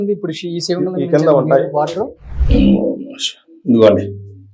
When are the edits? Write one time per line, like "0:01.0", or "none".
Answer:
none